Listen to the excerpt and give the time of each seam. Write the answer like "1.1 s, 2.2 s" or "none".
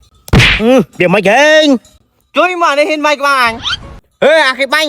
none